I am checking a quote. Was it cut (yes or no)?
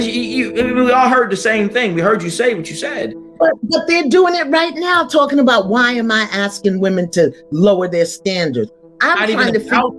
no